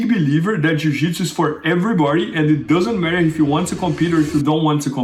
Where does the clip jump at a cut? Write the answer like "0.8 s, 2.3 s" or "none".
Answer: none